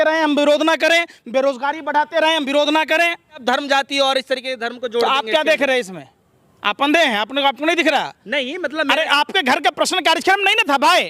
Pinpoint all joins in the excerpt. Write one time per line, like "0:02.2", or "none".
0:03.4